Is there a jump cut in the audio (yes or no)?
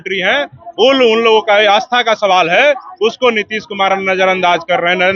no